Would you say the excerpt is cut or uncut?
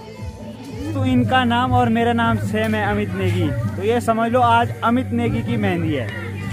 cut